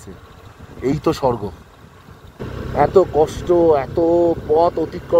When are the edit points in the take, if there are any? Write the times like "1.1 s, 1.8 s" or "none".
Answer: 2.5 s